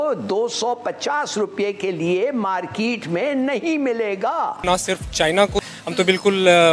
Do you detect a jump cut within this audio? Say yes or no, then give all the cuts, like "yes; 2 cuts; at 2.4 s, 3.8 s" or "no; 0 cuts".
yes; 2 cuts; at 4.6 s, 5.6 s